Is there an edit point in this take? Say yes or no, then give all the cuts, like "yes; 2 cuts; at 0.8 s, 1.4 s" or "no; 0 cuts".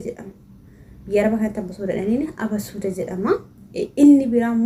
no; 0 cuts